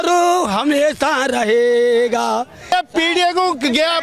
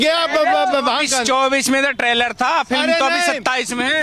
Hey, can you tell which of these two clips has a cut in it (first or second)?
first